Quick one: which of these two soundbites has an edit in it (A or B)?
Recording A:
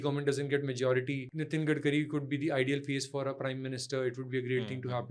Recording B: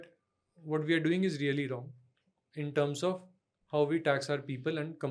A